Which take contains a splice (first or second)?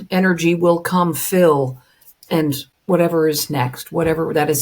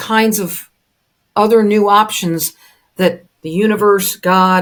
first